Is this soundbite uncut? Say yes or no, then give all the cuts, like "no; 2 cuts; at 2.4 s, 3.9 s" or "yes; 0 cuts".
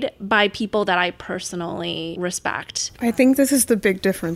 no; 1 cut; at 2.3 s